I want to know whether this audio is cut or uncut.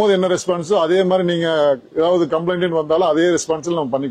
uncut